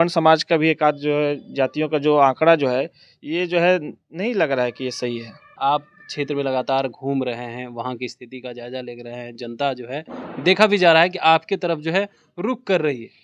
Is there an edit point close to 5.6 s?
yes; 1 cut; at 5.6 s

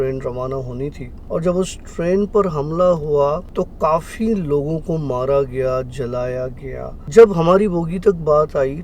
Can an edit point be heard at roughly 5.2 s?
no; 3 cuts; at 1.1 s, 3.5 s, 7.0 s

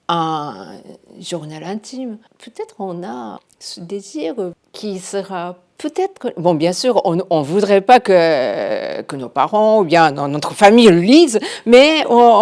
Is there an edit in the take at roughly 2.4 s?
yes; 3 cuts; at 2.4 s, 3.4 s, 4.6 s

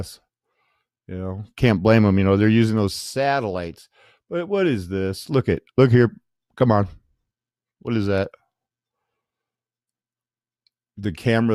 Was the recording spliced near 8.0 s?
no; 1 cut; at 5.1 s

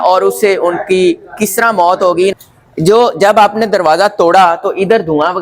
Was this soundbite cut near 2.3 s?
yes; 1 cut; at 2.3 s

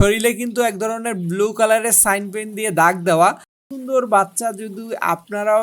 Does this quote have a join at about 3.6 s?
yes; 1 cut; at 3.6 s

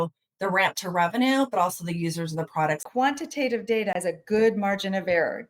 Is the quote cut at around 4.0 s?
yes; 2 cuts; at 2.8 s, 4.0 s

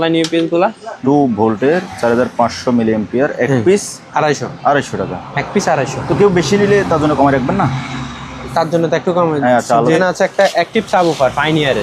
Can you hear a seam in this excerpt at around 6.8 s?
no; 2 cuts; at 0.9 s, 10.0 s

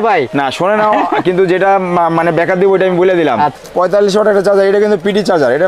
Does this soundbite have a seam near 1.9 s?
no; 1 cut; at 3.6 s

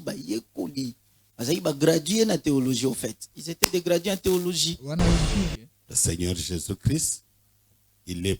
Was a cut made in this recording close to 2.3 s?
no; 1 cut; at 5.4 s

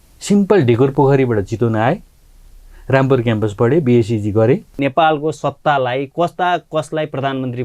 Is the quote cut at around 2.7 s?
no; 1 cut; at 4.8 s

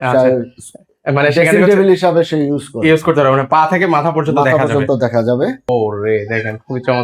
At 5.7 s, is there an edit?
yes; 1 cut; at 5.7 s

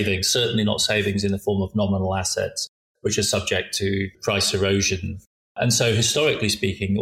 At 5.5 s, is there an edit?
yes; 2 cuts; at 4.2 s, 5.5 s

